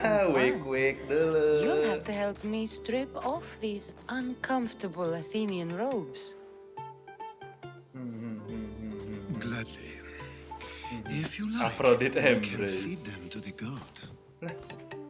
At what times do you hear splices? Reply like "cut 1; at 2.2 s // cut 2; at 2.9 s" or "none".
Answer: none